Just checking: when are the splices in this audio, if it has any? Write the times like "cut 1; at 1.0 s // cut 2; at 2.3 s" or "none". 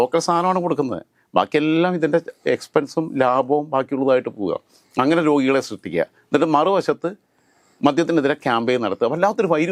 none